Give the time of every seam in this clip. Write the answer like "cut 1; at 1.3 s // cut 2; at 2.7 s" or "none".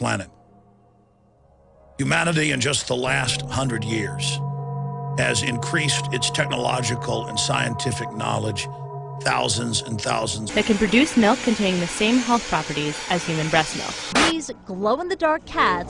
none